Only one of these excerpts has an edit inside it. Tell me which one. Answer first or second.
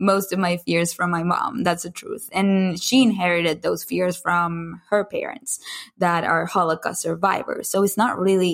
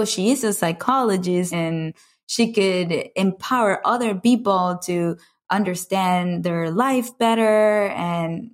second